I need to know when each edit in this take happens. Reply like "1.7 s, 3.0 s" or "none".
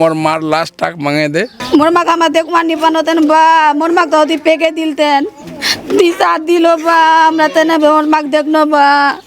1.6 s